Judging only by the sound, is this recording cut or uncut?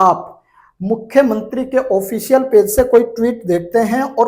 uncut